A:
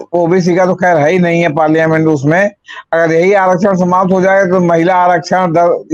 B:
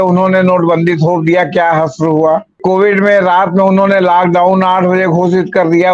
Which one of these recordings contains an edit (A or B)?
B